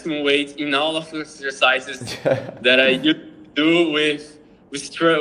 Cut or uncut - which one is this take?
uncut